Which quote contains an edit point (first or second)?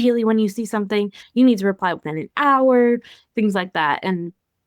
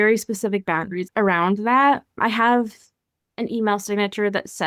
second